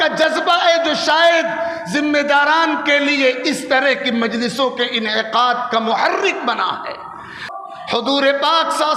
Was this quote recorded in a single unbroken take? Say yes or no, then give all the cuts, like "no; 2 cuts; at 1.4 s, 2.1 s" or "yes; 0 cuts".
no; 1 cut; at 7.4 s